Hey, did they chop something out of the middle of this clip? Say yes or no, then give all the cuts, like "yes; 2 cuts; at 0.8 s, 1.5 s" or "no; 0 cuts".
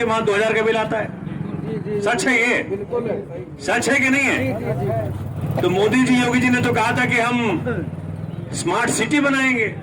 yes; 1 cut; at 5.3 s